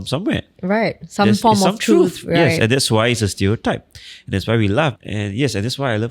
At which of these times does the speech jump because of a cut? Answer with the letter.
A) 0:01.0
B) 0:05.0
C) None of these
B